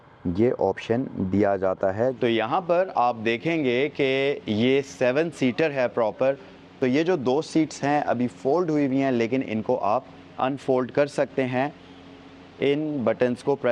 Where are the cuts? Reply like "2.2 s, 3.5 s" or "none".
2.1 s